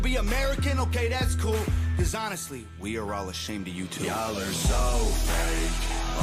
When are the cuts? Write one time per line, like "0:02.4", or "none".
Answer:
0:02.7